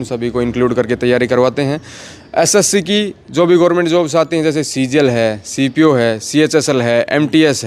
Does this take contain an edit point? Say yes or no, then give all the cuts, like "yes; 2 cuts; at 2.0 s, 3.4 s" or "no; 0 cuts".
no; 0 cuts